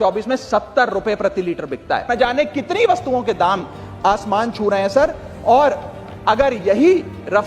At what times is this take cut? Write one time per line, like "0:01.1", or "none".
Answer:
0:02.1